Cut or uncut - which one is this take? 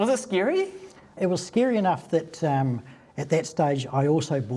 cut